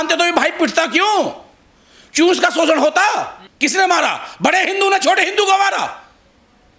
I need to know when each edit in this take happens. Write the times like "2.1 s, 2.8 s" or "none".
3.4 s